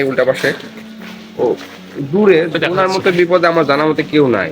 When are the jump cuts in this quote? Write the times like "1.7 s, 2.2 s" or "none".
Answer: 2.6 s